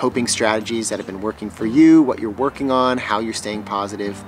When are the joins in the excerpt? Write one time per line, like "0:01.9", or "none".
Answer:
none